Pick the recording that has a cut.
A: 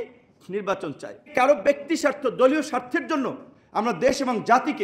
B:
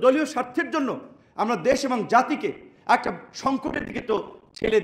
A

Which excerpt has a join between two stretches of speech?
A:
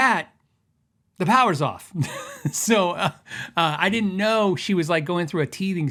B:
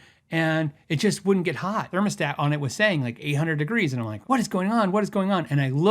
B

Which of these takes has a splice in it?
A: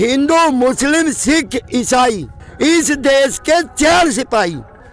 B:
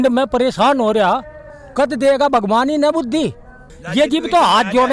B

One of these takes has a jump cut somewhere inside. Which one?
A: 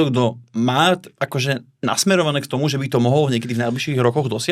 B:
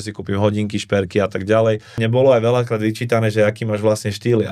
B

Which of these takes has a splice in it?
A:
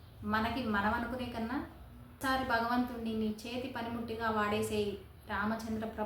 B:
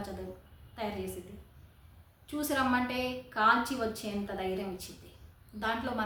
A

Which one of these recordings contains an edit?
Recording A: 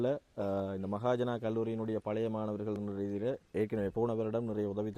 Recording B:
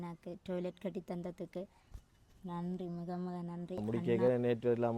B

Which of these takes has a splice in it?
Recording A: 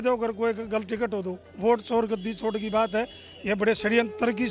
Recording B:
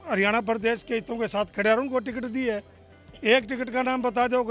A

